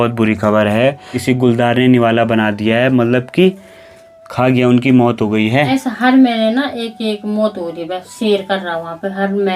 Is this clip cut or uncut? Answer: cut